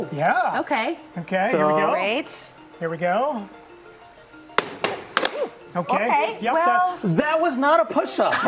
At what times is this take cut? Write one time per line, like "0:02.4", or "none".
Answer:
none